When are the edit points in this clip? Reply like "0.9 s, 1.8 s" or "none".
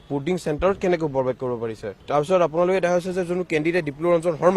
none